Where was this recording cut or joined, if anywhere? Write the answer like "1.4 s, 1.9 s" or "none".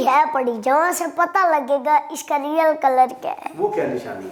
none